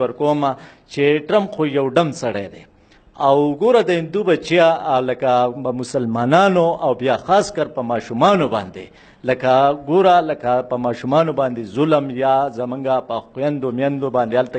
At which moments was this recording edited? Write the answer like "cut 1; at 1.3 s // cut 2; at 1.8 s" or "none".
none

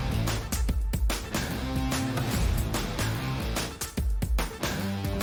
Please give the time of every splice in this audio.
none

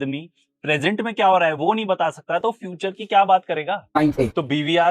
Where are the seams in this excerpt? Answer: cut 1; at 3.9 s

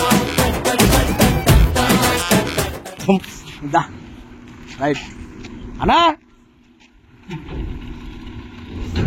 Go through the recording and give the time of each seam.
none

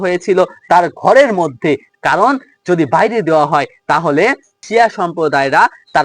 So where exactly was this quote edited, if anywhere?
cut 1; at 4.6 s

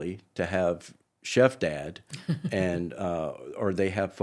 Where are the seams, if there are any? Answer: none

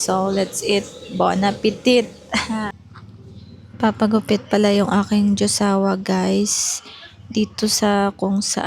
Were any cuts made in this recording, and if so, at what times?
cut 1; at 2.8 s

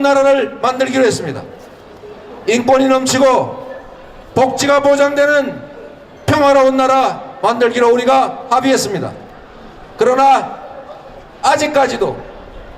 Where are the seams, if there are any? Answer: cut 1; at 4.6 s

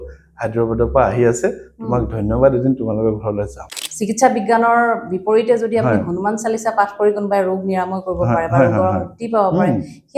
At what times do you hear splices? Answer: cut 1; at 3.8 s

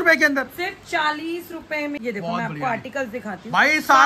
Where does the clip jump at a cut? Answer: cut 1; at 2.0 s

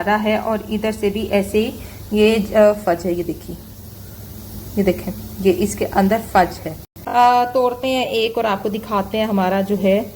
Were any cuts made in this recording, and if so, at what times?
cut 1; at 6.9 s

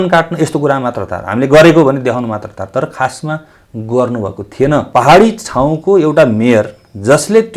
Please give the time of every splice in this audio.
cut 1; at 4.9 s

